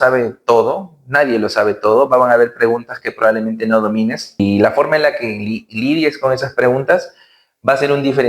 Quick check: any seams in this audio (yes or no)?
yes